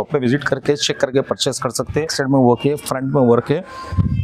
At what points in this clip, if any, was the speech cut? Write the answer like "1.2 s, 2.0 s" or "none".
2.1 s

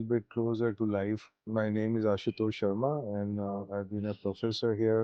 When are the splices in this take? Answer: 1.5 s

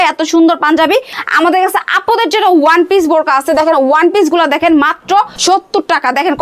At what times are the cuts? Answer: 1.2 s, 5.3 s

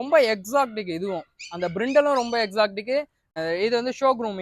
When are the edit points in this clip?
3.3 s

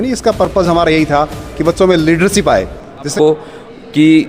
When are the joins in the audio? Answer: 3.1 s

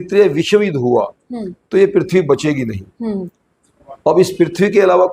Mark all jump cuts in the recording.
none

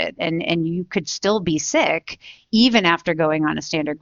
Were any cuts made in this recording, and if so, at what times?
none

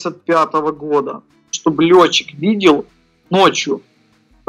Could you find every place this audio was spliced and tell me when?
1.5 s

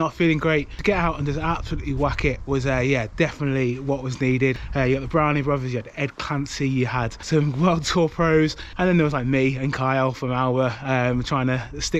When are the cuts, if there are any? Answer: 4.6 s, 7.2 s, 8.6 s

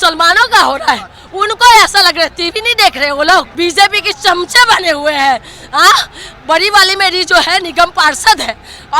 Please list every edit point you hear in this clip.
3.5 s

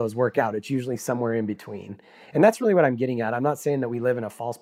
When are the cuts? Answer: none

